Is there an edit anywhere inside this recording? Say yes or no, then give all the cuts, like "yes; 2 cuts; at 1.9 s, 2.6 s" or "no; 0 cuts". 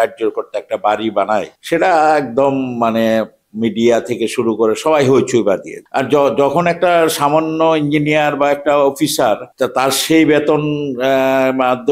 yes; 3 cuts; at 1.6 s, 5.8 s, 9.5 s